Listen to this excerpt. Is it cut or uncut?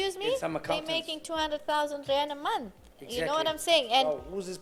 uncut